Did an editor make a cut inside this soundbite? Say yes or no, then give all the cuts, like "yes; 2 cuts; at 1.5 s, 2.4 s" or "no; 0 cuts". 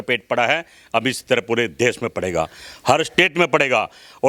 no; 0 cuts